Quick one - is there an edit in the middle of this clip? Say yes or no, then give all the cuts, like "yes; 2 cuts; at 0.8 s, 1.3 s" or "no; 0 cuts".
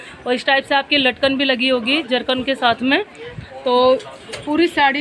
no; 0 cuts